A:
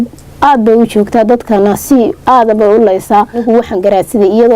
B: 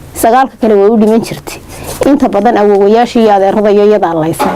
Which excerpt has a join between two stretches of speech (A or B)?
A